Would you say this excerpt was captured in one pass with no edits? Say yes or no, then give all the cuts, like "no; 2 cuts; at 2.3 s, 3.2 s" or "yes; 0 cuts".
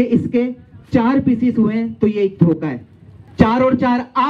no; 1 cut; at 3.2 s